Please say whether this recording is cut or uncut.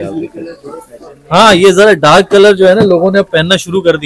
uncut